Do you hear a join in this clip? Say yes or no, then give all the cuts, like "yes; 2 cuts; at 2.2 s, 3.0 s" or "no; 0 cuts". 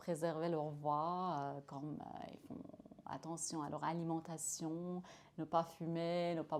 no; 0 cuts